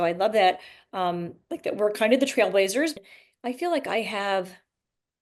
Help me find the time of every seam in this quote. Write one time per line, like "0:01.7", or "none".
0:02.9